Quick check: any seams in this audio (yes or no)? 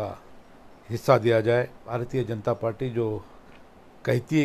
yes